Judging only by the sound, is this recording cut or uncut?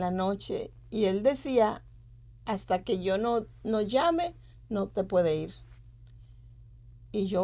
uncut